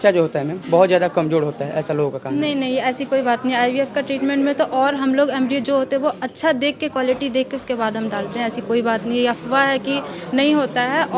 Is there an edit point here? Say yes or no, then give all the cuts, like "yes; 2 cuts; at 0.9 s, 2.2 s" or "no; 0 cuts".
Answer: no; 0 cuts